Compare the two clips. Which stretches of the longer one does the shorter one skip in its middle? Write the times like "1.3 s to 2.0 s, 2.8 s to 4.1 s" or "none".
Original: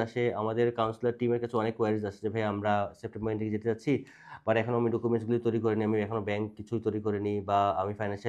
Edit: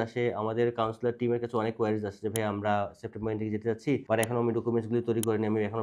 4.0 s to 4.4 s